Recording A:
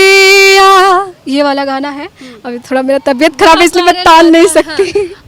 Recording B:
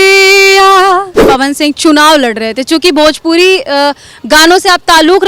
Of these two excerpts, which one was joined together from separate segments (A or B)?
B